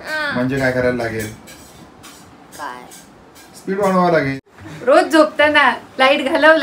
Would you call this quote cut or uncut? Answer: cut